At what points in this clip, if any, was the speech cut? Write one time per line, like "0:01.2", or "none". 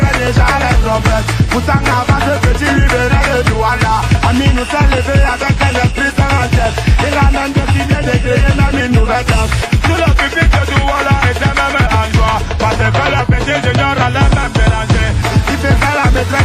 none